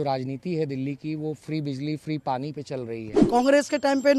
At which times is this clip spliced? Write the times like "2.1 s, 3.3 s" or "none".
3.1 s